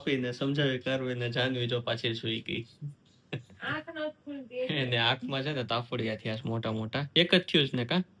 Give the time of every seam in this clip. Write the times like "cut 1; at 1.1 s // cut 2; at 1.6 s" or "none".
cut 1; at 7.1 s